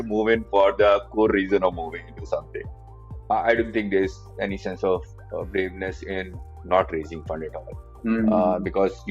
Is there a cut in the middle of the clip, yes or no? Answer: yes